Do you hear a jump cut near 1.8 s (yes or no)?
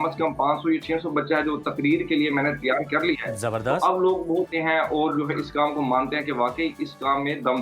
no